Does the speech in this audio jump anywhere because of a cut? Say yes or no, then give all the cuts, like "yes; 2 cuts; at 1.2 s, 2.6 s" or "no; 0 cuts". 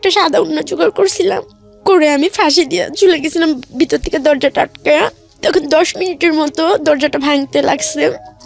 no; 0 cuts